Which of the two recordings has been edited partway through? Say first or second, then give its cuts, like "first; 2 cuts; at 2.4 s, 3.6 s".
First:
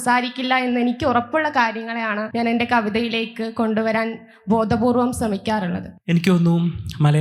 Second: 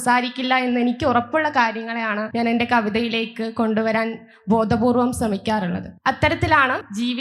first; 1 cut; at 5.9 s